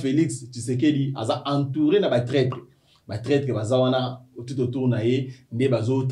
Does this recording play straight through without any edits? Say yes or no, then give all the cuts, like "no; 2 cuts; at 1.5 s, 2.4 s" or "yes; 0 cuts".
yes; 0 cuts